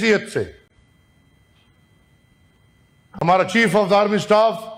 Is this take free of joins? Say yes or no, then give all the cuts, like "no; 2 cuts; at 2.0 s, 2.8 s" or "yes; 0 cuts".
yes; 0 cuts